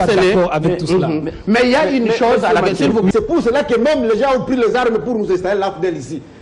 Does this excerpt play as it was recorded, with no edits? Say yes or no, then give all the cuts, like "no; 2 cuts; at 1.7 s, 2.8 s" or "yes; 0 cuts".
no; 1 cut; at 3.1 s